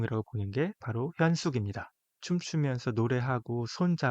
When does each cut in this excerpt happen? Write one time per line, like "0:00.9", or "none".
0:02.2